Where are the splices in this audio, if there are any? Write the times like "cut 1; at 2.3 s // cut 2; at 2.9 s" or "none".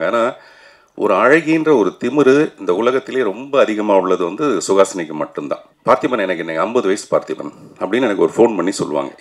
cut 1; at 5.7 s